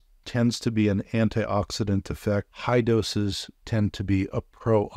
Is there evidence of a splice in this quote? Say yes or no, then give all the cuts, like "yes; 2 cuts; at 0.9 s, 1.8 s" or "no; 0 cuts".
no; 0 cuts